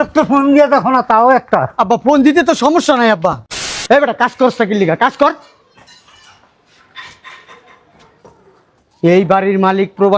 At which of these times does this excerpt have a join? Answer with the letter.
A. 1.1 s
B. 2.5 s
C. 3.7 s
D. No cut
C